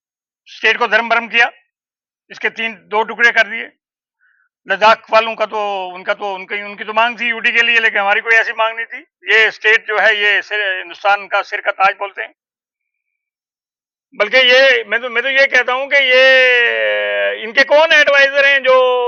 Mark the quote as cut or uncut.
uncut